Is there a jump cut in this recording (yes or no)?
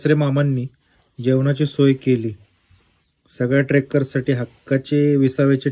no